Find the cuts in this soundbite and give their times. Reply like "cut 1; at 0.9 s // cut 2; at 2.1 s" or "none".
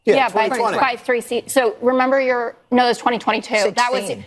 none